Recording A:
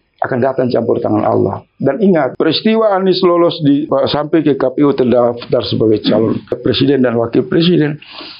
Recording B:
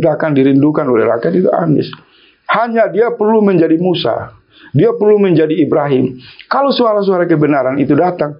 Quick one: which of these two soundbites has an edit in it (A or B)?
A